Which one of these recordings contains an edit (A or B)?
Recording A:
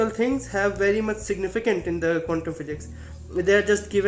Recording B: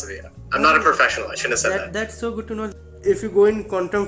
B